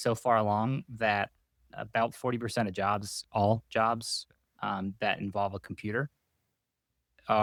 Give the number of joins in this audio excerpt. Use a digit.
0